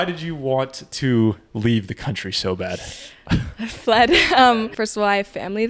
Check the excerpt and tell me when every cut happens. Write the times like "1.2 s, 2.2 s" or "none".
4.7 s